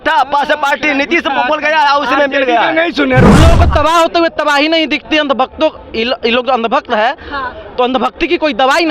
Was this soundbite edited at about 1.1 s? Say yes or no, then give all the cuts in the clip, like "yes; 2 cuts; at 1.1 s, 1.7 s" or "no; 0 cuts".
no; 1 cut; at 3.3 s